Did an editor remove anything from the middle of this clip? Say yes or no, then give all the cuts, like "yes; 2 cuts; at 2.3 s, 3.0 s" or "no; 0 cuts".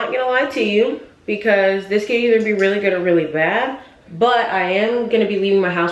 no; 0 cuts